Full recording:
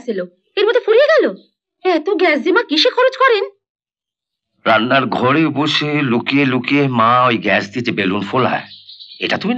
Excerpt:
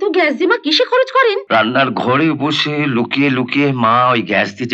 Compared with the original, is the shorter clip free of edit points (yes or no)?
no